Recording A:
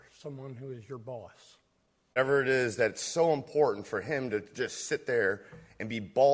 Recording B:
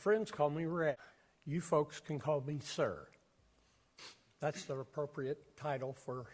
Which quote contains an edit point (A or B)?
A